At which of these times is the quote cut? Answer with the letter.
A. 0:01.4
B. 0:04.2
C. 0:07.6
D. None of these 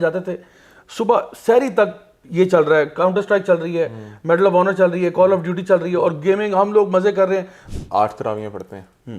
C